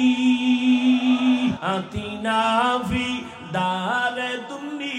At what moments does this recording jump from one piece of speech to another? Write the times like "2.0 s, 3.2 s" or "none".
1.6 s